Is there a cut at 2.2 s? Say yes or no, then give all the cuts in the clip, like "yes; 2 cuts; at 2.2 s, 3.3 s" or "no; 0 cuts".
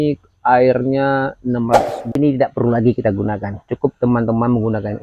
yes; 1 cut; at 2.2 s